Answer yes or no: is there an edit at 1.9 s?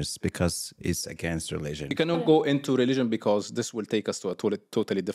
yes